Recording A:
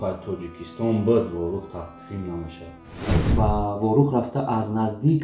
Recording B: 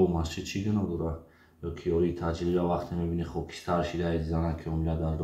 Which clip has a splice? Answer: A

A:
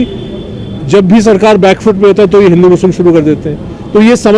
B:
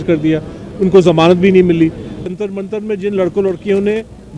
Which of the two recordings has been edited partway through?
B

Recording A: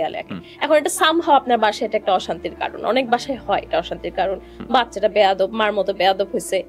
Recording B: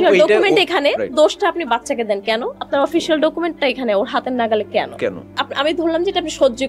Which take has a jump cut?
B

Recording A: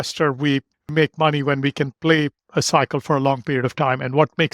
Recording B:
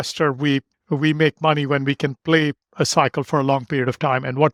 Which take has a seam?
A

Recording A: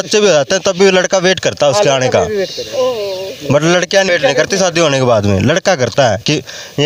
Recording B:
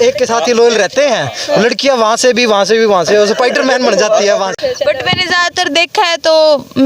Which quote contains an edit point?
B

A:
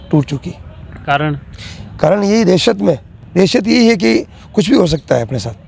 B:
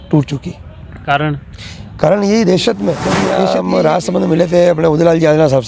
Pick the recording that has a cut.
B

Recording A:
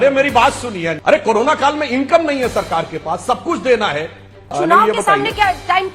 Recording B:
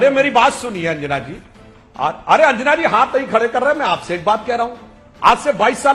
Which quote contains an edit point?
A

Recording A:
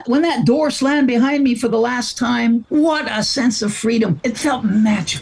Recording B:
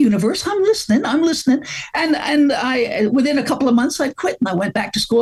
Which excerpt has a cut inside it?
A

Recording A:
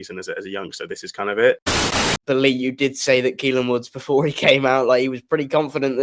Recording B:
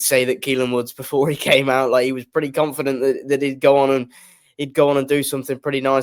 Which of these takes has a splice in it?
A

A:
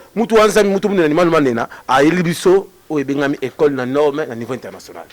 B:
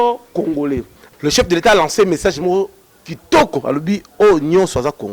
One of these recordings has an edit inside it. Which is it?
B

